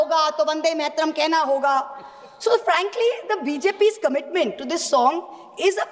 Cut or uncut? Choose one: uncut